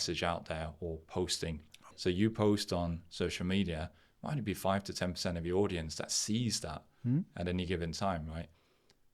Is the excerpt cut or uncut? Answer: cut